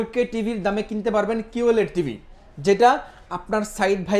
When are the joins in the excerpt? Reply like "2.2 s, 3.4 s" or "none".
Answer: none